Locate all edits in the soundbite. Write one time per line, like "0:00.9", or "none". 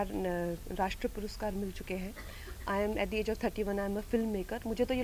none